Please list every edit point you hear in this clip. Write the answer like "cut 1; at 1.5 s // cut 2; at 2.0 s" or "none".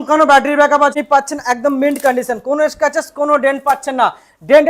cut 1; at 0.9 s